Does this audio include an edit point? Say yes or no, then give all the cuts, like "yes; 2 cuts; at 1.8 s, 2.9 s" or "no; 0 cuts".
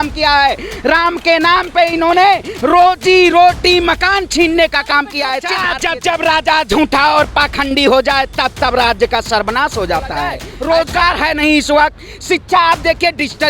yes; 2 cuts; at 5.5 s, 10.5 s